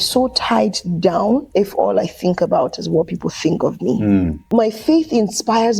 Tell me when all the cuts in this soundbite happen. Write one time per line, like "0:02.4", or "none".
0:01.5
0:04.4

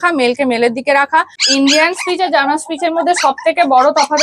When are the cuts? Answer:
0:01.3

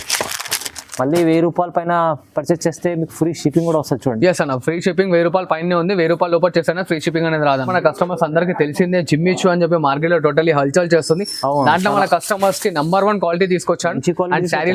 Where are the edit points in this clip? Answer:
0:07.7

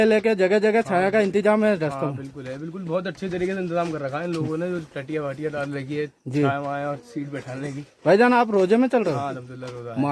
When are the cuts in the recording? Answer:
none

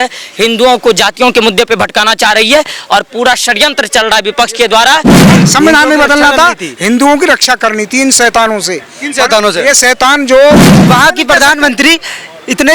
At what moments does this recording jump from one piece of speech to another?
0:05.4
0:10.7

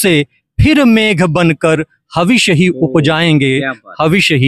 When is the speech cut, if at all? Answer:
none

